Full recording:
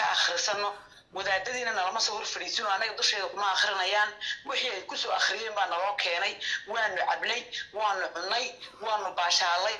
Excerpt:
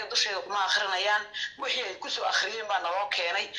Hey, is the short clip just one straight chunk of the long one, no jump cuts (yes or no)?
yes